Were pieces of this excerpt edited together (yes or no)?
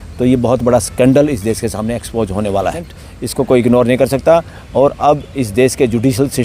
yes